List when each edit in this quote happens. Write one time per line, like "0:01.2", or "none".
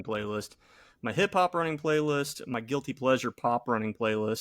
0:02.4